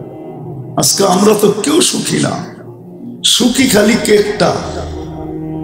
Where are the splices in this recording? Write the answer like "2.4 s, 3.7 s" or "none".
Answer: 4.6 s